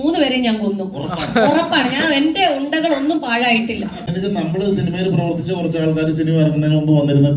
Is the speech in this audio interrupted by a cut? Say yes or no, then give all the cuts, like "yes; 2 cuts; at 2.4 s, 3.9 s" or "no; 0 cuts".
yes; 1 cut; at 4.1 s